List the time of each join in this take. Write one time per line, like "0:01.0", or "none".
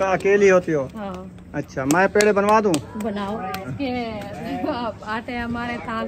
0:03.7

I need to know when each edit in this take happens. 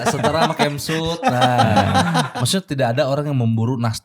0:02.3

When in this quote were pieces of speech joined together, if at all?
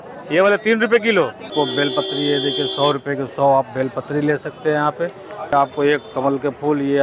0:01.5
0:05.5

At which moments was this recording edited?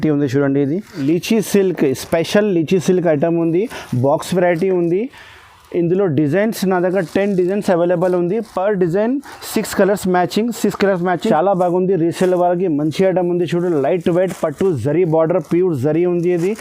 0:01.0
0:11.3

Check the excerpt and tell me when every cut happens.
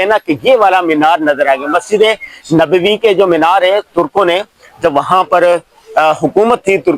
none

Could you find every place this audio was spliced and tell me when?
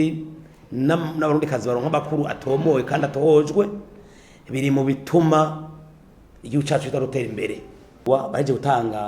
0:08.0

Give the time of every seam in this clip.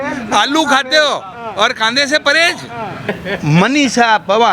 0:03.0

